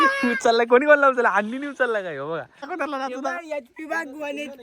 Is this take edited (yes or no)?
yes